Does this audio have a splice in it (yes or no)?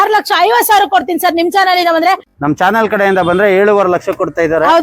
yes